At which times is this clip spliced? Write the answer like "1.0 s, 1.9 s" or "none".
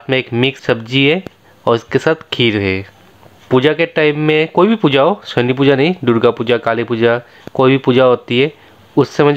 none